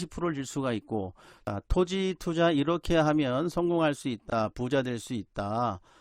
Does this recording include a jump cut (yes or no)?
yes